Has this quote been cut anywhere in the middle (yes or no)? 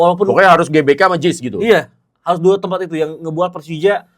no